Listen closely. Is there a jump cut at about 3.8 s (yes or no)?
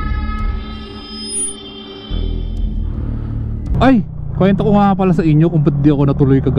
yes